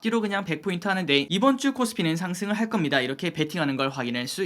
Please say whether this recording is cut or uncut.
cut